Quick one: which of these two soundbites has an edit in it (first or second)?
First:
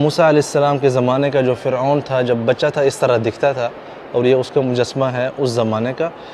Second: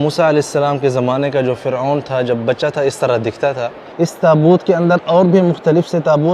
second